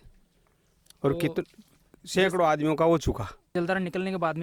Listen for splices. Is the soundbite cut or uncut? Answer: cut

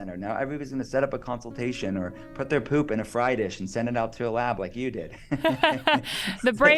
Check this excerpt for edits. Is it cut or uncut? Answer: uncut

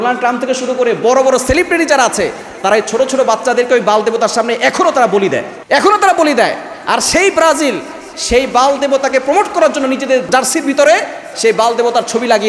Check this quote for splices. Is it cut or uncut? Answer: uncut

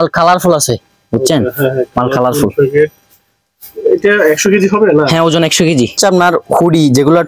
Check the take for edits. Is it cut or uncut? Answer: cut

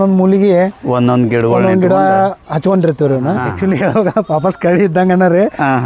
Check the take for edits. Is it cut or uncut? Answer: cut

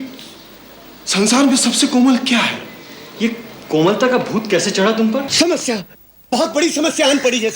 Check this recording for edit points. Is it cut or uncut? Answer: cut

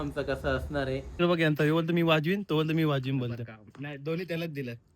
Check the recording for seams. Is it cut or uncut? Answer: cut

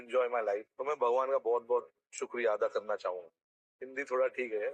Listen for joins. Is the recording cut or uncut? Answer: uncut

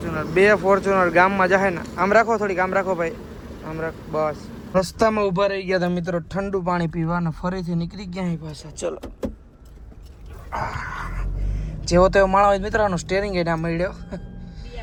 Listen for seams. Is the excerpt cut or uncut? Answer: uncut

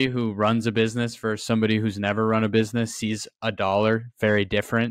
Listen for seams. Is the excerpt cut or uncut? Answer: uncut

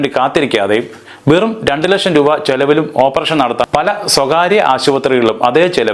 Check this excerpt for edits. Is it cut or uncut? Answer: cut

